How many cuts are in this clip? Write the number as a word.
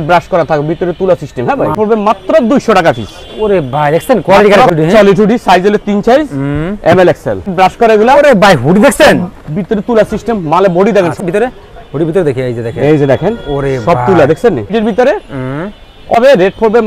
six